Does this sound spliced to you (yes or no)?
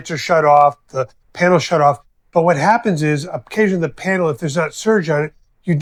no